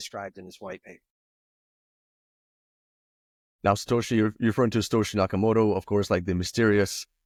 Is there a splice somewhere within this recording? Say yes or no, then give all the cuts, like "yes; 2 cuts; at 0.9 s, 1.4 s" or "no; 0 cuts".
no; 0 cuts